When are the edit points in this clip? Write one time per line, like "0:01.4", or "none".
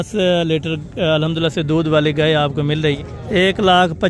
0:03.0